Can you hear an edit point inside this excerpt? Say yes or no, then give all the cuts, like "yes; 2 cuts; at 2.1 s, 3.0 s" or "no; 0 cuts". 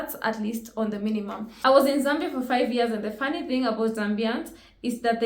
yes; 1 cut; at 1.4 s